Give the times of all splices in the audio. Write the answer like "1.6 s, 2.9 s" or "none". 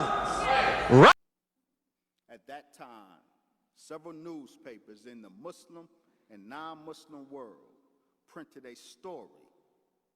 1.1 s